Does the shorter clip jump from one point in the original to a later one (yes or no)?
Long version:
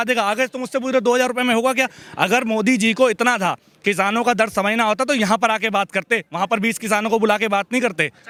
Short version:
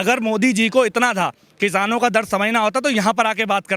no